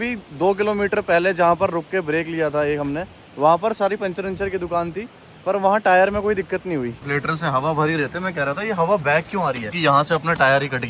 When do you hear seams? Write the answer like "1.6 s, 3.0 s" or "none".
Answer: 7.0 s, 9.7 s